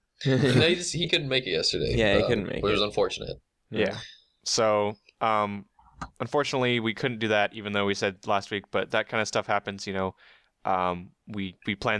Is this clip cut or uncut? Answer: cut